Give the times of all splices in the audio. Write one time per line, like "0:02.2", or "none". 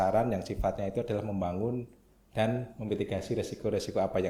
none